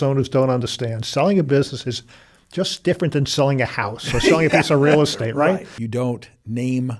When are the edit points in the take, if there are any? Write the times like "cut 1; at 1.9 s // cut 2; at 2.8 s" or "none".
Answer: cut 1; at 5.7 s